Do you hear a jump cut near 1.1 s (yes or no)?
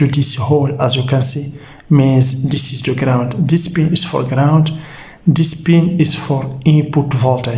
no